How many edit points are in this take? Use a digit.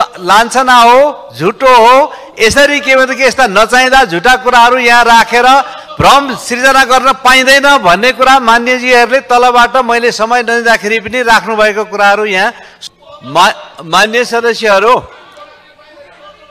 1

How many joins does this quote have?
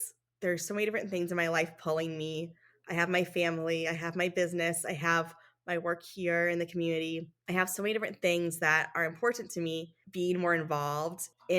1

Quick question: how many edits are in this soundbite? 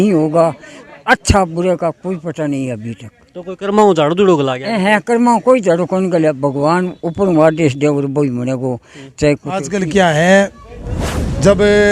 1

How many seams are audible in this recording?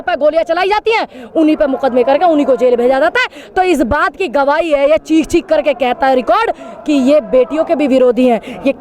0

